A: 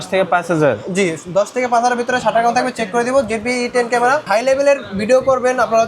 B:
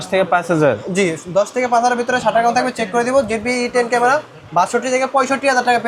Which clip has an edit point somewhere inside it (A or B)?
A